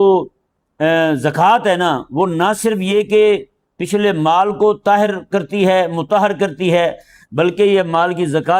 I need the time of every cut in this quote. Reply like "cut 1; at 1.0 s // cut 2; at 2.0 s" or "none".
none

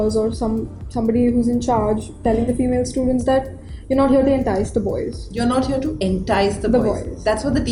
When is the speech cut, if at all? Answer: none

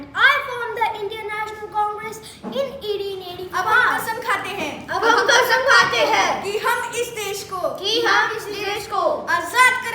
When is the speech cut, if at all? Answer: cut 1; at 4.0 s

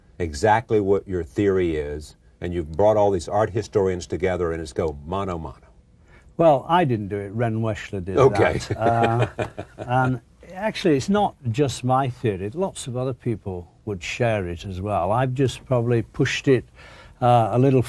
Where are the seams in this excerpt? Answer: none

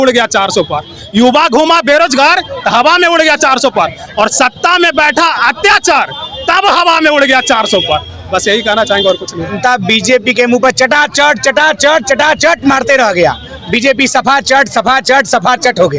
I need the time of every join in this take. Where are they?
cut 1; at 9.5 s

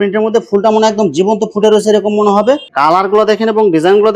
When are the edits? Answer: cut 1; at 2.7 s

